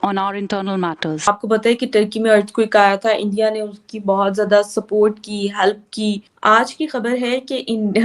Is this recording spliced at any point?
yes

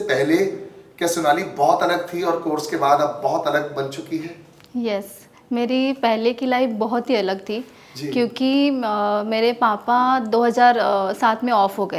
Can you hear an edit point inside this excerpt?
no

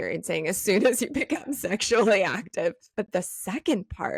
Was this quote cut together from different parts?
yes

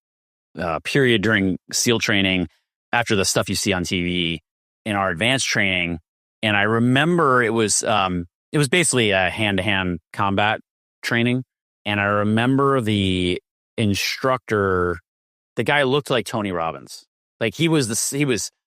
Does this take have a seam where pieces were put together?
no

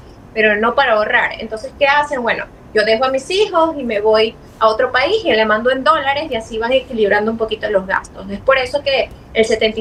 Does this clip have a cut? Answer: no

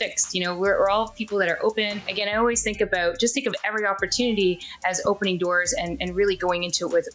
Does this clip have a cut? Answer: yes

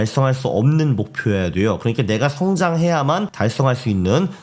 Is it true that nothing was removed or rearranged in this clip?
no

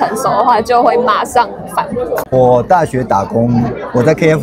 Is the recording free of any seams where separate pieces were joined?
no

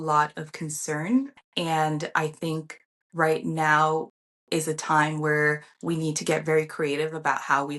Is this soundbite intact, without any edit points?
no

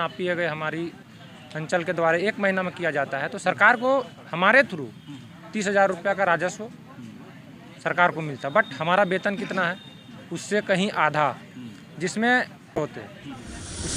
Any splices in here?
yes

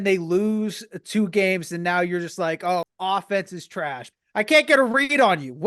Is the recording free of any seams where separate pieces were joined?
no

